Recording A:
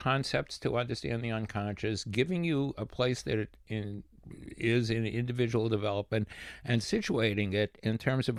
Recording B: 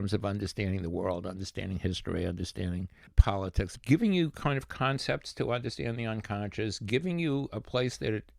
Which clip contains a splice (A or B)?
B